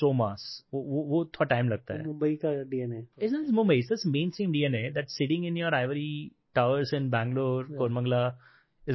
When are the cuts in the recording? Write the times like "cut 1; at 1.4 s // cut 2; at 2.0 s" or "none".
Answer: cut 1; at 3.0 s